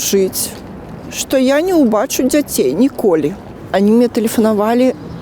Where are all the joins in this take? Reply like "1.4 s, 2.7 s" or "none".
3.4 s